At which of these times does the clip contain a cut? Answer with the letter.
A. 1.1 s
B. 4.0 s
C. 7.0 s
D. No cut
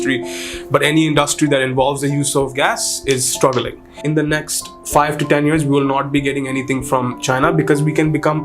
B